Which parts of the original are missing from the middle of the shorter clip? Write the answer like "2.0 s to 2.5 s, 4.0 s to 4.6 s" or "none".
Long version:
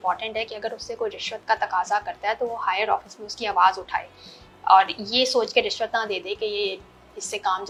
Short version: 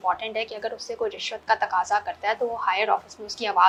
none